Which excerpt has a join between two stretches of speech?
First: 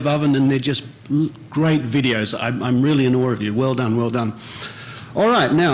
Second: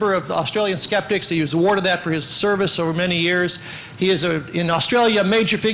first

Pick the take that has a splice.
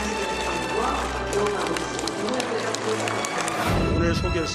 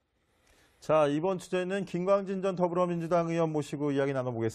first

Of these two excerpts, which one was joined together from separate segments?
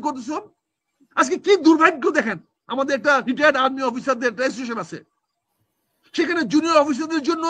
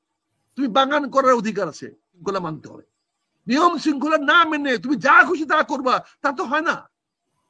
second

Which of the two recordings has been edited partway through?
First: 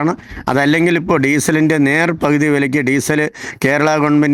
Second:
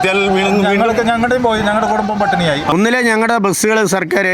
second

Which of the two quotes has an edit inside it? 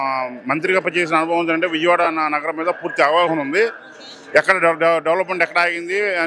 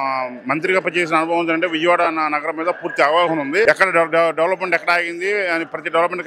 second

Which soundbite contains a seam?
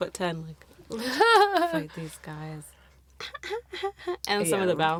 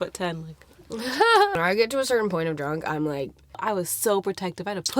second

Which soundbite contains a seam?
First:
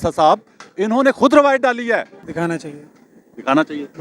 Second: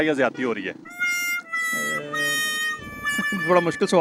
first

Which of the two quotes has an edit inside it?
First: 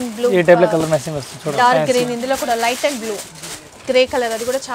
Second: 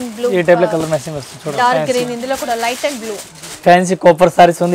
second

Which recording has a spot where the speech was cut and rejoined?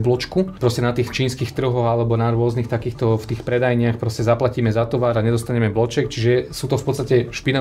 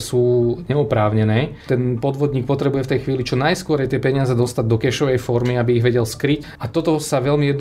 second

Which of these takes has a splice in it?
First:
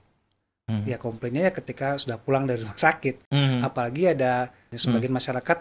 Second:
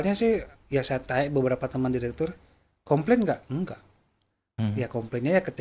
first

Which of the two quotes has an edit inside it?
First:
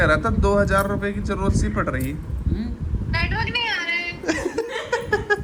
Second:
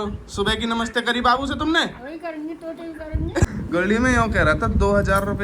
second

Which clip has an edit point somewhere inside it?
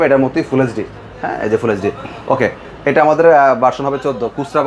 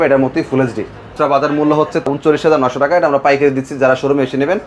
second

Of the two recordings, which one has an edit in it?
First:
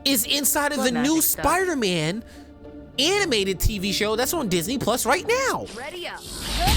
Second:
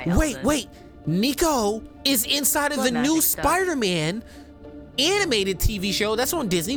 first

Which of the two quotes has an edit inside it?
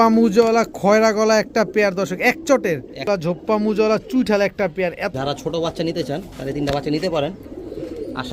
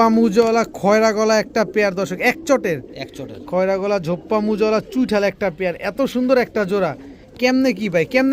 first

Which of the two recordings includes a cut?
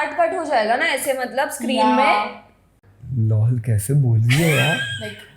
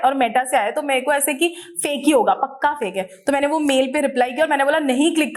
first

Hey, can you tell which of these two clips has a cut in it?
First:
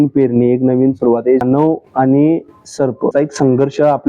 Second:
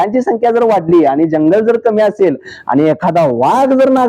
first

